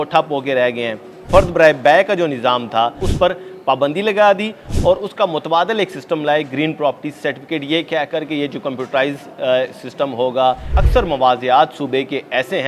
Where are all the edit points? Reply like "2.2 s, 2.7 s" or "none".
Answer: 1.2 s, 3.1 s, 10.7 s